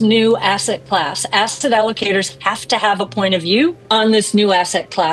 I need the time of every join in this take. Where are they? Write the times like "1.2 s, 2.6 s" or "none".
3.8 s